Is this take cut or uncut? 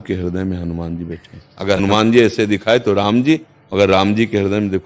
cut